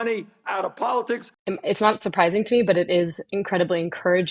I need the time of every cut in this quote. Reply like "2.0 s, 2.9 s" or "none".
1.3 s